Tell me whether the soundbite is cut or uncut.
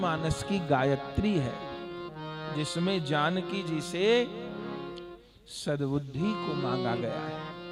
uncut